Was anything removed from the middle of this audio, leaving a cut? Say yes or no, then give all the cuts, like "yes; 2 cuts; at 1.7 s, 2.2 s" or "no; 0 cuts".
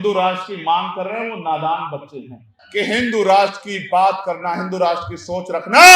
no; 0 cuts